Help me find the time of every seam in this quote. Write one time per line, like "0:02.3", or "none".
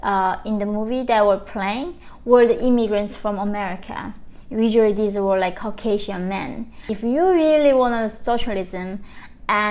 0:06.9